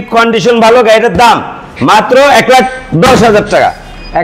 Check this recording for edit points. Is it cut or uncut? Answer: uncut